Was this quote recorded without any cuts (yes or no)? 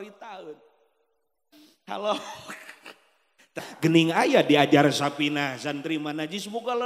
no